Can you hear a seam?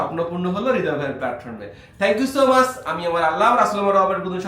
no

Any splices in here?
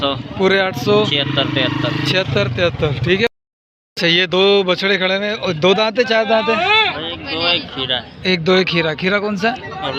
yes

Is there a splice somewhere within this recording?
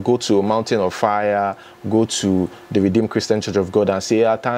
no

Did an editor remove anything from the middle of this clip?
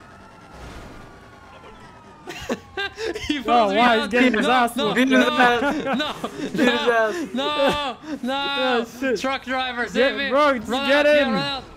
no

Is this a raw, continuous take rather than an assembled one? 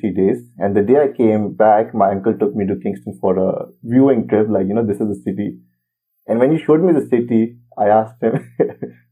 yes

